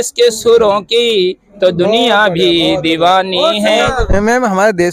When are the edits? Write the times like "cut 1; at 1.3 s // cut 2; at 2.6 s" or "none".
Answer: cut 1; at 4.0 s